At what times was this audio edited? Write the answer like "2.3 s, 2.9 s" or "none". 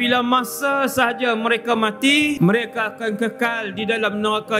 2.4 s